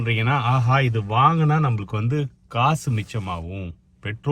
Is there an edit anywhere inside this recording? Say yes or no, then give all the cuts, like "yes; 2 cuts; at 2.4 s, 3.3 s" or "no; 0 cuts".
no; 0 cuts